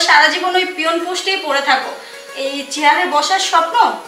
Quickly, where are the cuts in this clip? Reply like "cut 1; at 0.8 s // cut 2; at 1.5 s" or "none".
none